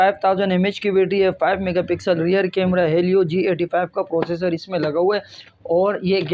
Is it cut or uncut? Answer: uncut